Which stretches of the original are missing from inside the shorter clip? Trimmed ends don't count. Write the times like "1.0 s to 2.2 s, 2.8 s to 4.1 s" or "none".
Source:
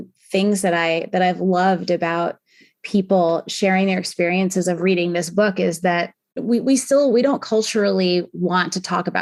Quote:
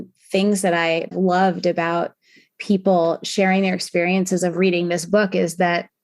1.1 s to 1.3 s